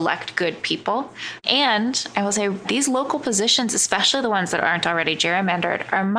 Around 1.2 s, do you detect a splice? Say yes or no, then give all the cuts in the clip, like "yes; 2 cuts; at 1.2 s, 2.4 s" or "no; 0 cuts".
no; 0 cuts